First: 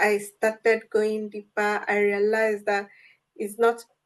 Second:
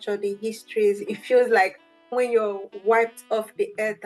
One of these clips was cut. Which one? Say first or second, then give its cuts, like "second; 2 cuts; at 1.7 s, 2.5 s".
second; 2 cuts; at 1.0 s, 2.1 s